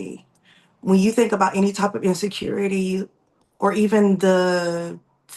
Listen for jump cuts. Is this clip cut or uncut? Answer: uncut